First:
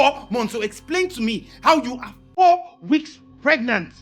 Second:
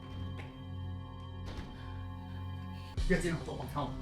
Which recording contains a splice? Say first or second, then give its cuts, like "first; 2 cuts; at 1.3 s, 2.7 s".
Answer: second; 1 cut; at 2.9 s